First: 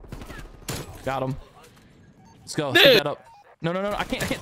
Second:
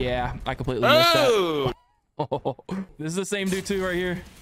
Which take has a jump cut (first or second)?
second